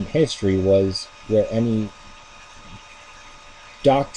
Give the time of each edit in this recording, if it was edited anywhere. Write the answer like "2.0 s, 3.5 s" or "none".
2.4 s